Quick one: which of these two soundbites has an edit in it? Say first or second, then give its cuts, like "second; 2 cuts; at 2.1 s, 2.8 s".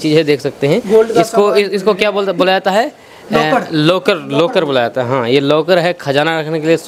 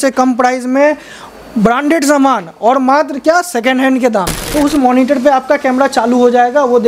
second; 1 cut; at 4.4 s